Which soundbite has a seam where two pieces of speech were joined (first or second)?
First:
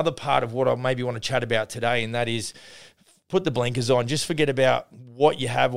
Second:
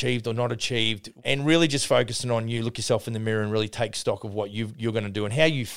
second